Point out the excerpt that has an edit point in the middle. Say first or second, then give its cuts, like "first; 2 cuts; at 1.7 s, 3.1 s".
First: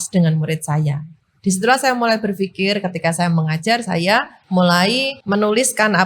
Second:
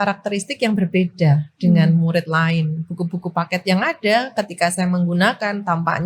first; 2 cuts; at 4.4 s, 5.1 s